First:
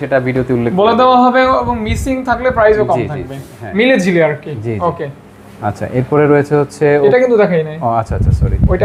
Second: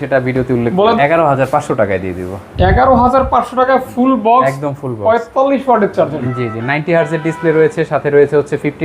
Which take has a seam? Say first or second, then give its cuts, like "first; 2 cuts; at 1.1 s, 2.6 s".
second; 2 cuts; at 1.0 s, 6.2 s